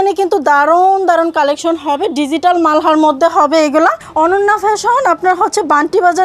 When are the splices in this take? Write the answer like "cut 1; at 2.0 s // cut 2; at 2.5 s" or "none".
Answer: cut 1; at 4.0 s